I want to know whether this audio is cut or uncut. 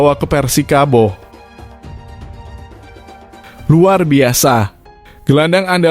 cut